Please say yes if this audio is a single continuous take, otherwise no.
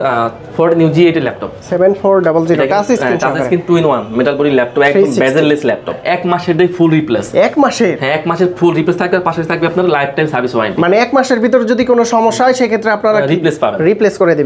no